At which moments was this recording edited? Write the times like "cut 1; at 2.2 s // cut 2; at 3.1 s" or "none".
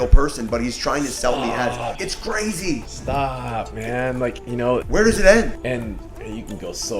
cut 1; at 2.0 s // cut 2; at 2.9 s // cut 3; at 4.6 s // cut 4; at 5.7 s